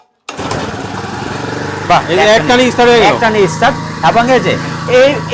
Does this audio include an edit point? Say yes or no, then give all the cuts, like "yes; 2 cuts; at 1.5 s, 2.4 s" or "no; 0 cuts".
no; 0 cuts